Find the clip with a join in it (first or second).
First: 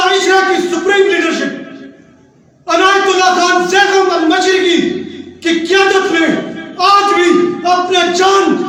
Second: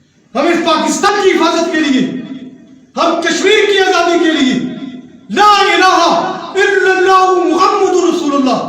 second